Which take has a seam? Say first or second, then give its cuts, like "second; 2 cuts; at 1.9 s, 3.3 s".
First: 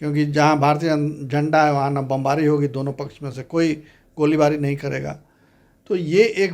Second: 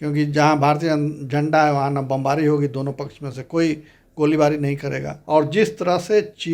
second; 1 cut; at 5.1 s